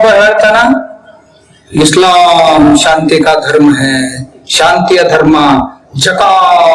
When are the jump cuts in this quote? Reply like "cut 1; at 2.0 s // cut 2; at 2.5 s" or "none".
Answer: none